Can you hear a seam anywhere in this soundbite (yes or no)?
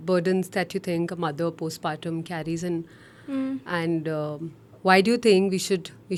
no